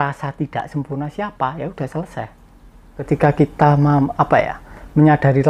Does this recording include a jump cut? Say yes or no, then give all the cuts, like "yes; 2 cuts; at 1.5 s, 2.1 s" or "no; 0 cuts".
yes; 1 cut; at 3.1 s